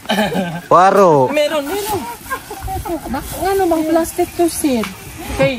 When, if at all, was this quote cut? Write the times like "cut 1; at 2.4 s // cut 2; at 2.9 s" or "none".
none